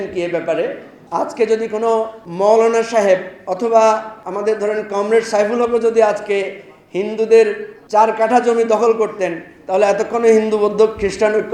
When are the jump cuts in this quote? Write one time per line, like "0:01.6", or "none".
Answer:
0:00.9
0:02.2
0:03.4
0:04.2
0:07.7